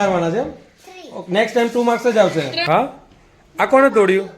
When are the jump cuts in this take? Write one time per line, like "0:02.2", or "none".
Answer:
0:02.6